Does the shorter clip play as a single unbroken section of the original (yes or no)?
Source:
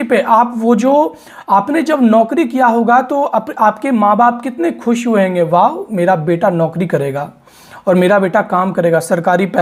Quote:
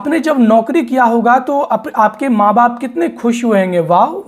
yes